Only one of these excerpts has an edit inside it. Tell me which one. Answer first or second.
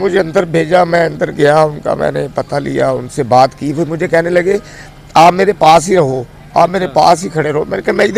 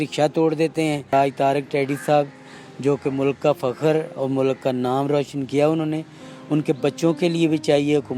second